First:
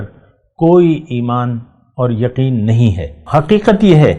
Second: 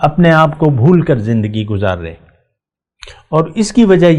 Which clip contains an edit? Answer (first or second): first